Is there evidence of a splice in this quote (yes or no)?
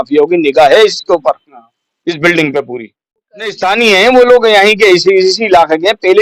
yes